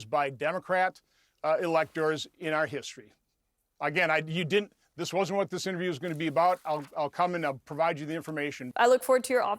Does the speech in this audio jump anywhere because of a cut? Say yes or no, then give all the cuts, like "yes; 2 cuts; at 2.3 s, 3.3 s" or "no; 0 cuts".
yes; 1 cut; at 8.6 s